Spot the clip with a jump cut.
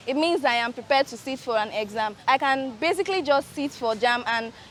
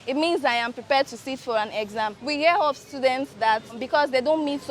second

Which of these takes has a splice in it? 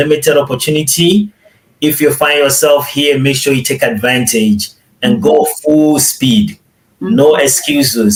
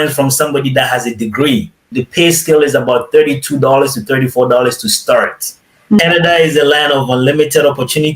second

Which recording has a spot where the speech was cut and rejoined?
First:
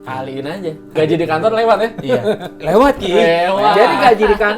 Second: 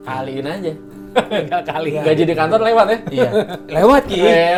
first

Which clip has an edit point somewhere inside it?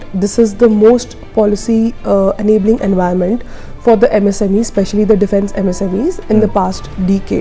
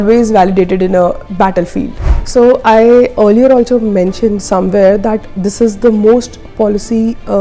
second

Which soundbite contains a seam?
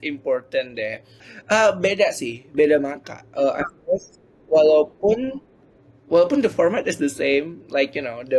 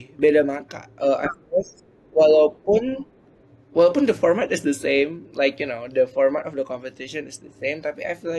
first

